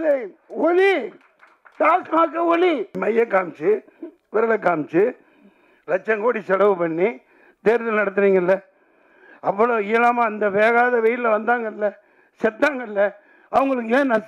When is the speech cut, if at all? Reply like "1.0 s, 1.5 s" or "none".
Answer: 2.9 s